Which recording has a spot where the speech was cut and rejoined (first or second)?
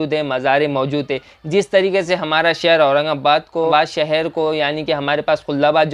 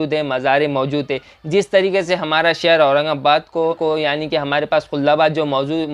second